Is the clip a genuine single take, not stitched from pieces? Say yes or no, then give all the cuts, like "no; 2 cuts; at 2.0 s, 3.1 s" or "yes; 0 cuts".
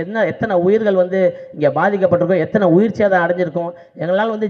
yes; 0 cuts